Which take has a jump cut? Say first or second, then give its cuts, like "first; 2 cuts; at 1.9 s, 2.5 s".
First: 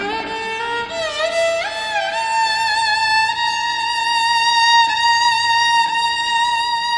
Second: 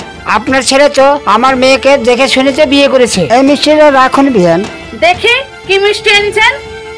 second; 1 cut; at 3.3 s